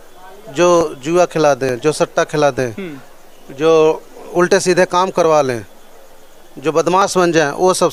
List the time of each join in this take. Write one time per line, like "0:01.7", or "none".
none